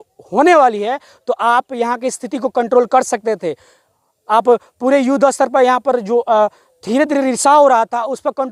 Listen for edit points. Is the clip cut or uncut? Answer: uncut